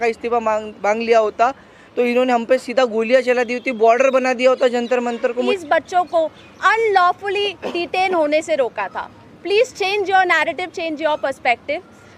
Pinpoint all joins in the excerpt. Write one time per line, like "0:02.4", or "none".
0:05.5